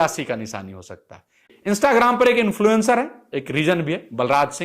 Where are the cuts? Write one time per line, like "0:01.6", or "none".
0:01.4